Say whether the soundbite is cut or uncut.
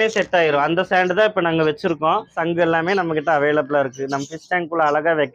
cut